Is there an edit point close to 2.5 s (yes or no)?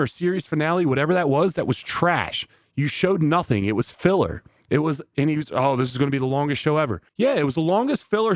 no